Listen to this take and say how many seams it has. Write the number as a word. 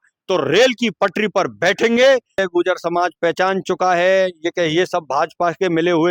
one